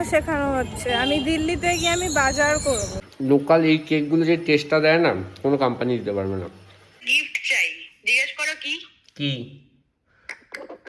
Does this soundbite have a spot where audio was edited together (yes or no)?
yes